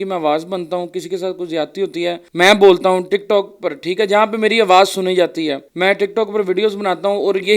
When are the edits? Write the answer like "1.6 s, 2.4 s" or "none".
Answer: 2.2 s, 5.7 s